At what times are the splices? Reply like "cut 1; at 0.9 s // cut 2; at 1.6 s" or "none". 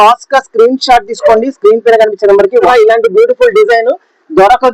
cut 1; at 2.7 s